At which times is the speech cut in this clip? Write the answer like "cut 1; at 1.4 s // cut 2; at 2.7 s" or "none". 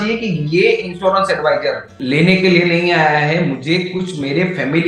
cut 1; at 1.9 s